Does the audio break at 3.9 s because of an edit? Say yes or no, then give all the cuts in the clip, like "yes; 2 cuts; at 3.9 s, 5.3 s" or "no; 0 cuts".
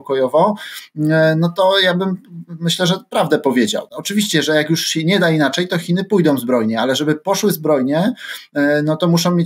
yes; 1 cut; at 3.9 s